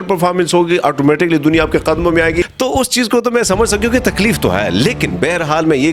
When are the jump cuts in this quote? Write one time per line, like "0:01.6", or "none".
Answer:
0:02.5